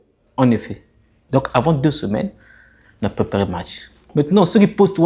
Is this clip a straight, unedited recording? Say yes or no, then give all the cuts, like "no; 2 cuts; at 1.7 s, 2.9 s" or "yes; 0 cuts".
no; 2 cuts; at 1.2 s, 4.1 s